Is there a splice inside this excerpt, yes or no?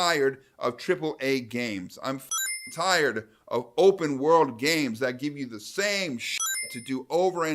no